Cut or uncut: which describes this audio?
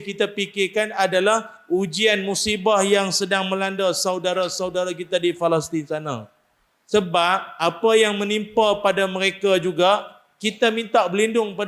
uncut